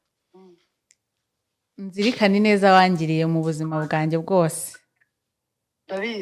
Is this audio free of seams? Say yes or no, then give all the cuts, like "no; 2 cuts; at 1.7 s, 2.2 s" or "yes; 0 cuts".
yes; 0 cuts